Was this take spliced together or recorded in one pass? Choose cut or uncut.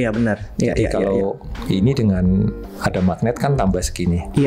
uncut